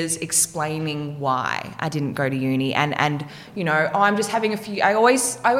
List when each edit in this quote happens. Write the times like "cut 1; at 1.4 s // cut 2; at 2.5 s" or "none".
none